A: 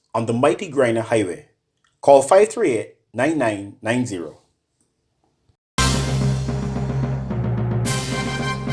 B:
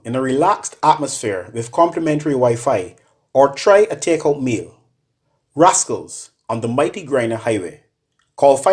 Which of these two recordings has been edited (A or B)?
A